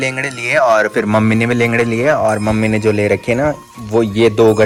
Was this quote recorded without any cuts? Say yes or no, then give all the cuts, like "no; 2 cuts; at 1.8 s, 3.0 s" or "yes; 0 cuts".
yes; 0 cuts